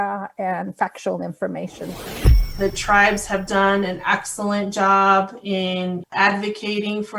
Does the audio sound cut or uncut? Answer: cut